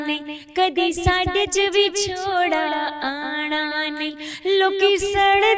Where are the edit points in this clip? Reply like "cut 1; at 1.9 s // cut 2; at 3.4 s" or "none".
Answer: none